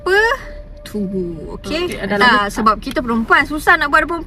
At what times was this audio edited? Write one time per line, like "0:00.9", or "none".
0:01.8